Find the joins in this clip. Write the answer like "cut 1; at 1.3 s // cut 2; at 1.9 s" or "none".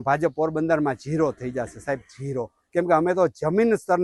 none